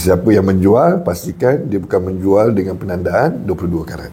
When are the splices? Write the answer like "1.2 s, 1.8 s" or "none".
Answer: none